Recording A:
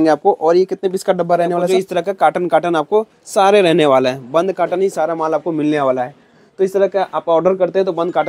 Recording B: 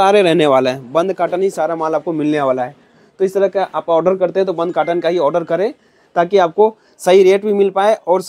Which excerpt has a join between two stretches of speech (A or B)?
A